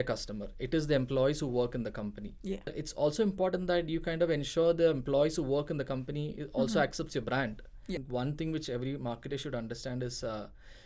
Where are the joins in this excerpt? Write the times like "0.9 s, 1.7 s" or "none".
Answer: 2.7 s, 8.0 s